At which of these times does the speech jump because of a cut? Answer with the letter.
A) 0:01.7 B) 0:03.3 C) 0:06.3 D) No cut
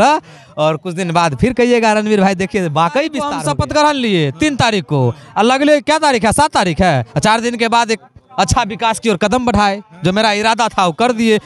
B